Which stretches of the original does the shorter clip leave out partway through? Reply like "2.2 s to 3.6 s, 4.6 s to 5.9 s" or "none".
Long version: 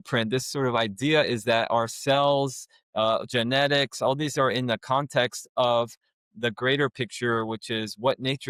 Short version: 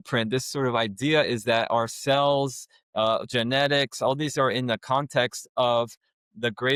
none